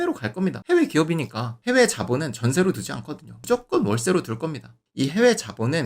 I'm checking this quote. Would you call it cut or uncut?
cut